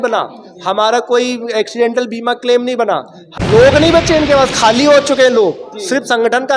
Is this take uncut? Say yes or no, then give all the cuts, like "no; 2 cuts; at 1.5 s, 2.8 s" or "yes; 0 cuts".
no; 1 cut; at 3.3 s